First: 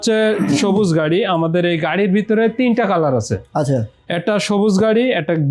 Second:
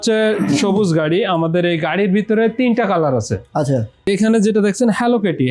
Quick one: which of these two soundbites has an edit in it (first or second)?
second